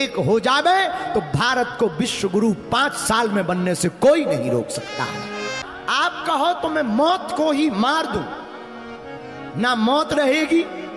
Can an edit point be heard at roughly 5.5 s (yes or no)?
yes